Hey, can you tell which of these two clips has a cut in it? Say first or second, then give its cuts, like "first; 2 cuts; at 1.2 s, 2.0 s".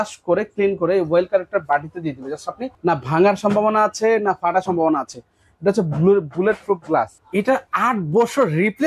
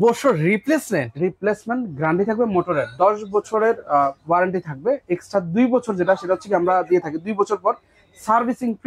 first; 2 cuts; at 2.7 s, 7.2 s